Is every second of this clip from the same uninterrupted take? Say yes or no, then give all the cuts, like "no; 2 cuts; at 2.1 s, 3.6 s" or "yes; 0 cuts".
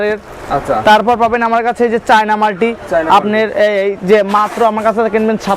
yes; 0 cuts